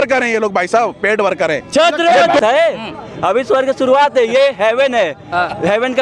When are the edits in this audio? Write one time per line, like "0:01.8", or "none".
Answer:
0:02.4

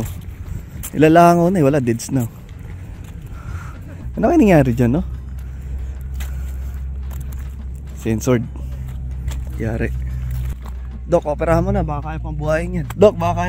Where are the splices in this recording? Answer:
none

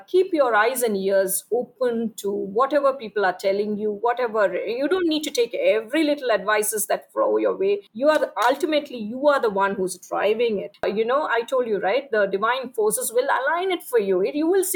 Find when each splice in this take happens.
0:07.9
0:10.7

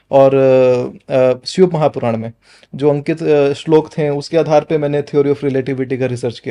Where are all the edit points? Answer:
none

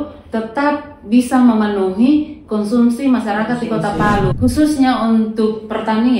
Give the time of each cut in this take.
0:04.3

